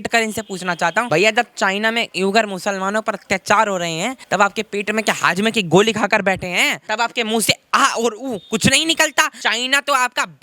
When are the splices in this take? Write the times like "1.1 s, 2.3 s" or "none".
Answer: 1.1 s, 4.2 s, 6.8 s, 9.4 s